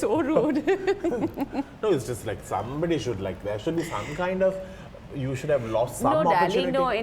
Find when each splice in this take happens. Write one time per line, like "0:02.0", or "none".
none